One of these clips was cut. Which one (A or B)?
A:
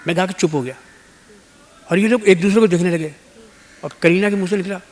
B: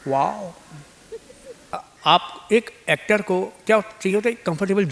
B